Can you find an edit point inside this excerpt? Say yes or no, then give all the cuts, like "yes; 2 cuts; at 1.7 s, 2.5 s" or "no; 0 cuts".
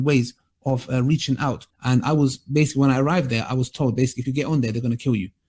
yes; 1 cut; at 1.7 s